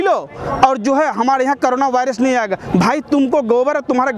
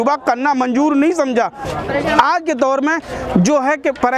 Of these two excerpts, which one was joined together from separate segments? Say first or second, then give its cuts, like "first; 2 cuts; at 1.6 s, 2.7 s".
second; 1 cut; at 1.6 s